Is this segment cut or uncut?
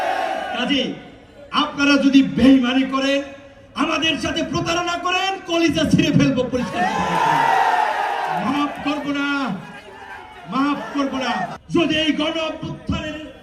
cut